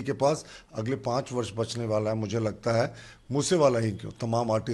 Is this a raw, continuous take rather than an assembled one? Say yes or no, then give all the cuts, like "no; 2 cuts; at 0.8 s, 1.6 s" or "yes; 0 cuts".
yes; 0 cuts